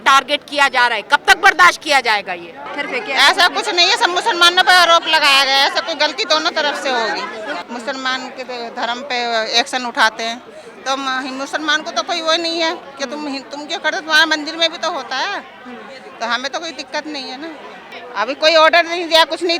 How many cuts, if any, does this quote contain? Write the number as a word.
three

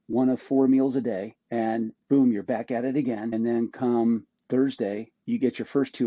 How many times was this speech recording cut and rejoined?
three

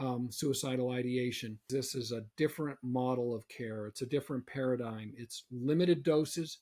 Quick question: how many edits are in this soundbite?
one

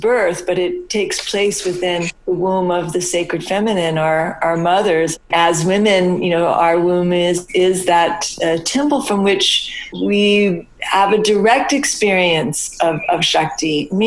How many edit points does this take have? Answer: two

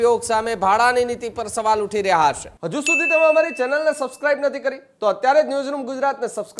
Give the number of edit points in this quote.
one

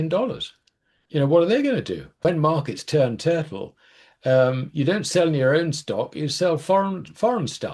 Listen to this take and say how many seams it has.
one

